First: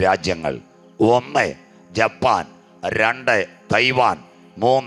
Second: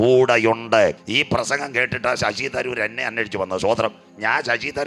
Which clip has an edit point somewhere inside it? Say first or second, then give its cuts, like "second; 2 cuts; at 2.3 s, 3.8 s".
second; 1 cut; at 1.0 s